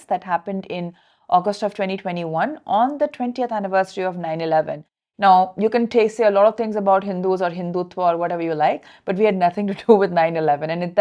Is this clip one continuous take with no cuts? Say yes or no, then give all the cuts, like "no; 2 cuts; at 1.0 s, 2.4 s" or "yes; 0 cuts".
yes; 0 cuts